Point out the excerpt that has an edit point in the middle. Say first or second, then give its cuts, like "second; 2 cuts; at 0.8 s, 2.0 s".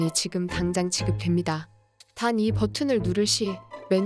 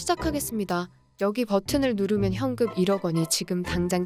second; 1 cut; at 1.0 s